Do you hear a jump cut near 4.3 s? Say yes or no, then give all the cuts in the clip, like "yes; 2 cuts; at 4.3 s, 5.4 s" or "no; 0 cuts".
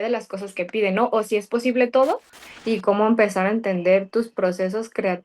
no; 1 cut; at 2.4 s